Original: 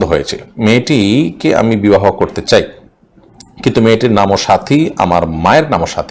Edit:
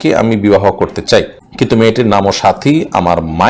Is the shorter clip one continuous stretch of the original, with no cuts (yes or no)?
no